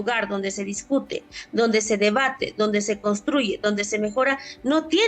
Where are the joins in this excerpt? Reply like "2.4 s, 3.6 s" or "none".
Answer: none